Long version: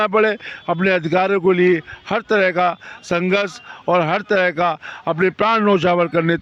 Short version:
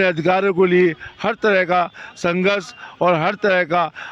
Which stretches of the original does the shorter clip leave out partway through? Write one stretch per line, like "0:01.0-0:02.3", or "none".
none

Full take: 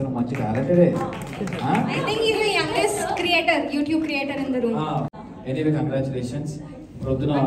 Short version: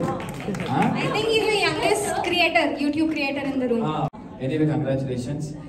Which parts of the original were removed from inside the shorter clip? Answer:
0:05.2-0:05.3

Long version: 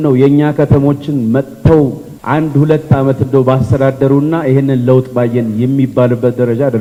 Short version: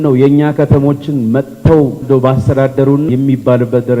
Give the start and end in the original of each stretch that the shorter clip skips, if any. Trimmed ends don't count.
0:02.0-0:03.2
0:04.3-0:05.6

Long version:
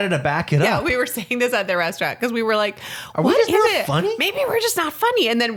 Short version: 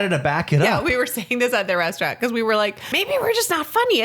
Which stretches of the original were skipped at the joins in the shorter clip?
0:03.0-0:04.2

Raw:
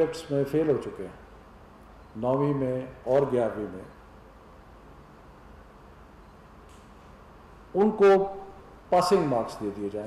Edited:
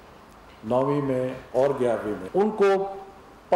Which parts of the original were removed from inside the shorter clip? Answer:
0:03.7-0:07.6

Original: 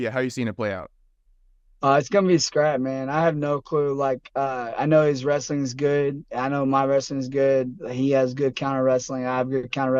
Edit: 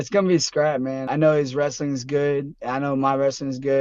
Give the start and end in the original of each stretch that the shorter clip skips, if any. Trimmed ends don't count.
0:03.0-0:04.7

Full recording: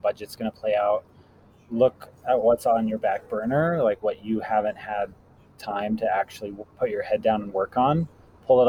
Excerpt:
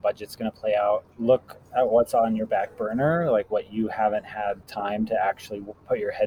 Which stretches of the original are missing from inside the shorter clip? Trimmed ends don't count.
0:01.1-0:01.6
0:05.2-0:05.6

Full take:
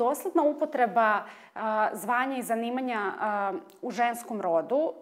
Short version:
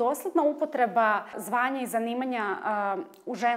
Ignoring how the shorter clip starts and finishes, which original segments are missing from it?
0:01.4-0:02.0

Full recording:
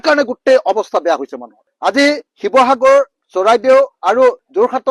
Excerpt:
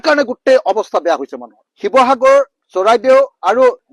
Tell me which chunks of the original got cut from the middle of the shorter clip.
0:01.7-0:02.3

